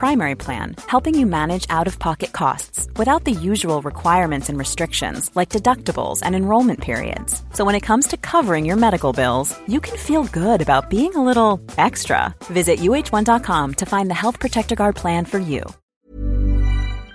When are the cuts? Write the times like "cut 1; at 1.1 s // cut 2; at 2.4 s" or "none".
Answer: cut 1; at 15.8 s